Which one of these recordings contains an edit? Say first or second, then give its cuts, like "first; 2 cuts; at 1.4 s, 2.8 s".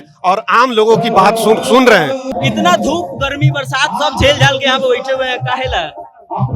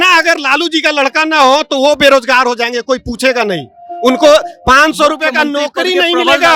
first; 1 cut; at 2.3 s